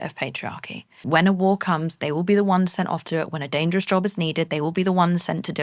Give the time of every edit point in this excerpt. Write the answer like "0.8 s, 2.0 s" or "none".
1.0 s